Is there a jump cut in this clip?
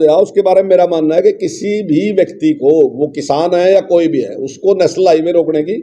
no; 0 cuts

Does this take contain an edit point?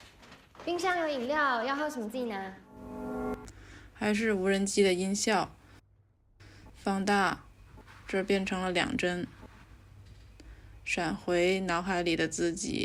no; 0 cuts

